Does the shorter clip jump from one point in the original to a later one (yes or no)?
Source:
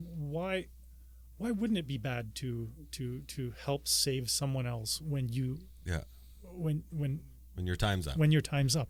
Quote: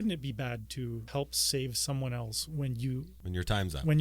yes